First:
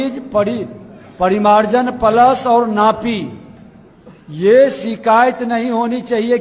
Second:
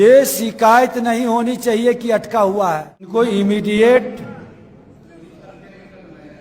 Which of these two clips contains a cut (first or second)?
second